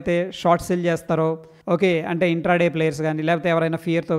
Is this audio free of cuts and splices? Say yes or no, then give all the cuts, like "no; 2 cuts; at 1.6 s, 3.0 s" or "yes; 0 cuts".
no; 1 cut; at 1.5 s